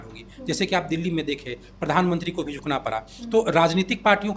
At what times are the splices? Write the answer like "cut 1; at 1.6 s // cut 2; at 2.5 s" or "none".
none